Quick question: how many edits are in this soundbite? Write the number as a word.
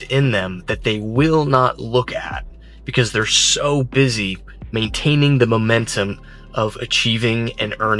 zero